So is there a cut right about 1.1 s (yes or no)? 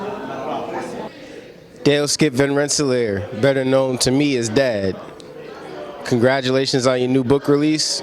yes